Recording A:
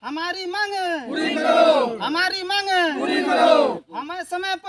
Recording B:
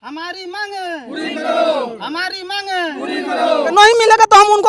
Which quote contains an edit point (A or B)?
B